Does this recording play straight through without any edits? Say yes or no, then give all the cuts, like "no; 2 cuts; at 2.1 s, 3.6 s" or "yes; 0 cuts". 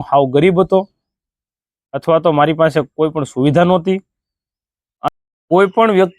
no; 1 cut; at 5.1 s